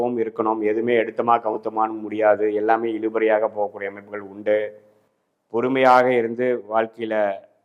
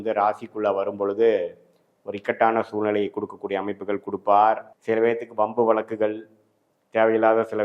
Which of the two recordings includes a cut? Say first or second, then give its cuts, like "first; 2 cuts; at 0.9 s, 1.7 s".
second; 1 cut; at 4.7 s